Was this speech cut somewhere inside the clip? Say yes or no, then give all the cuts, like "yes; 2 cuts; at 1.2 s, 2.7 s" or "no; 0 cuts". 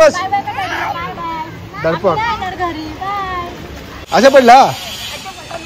yes; 1 cut; at 4.0 s